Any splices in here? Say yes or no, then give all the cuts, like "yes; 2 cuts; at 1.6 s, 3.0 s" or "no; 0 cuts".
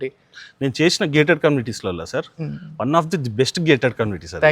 no; 0 cuts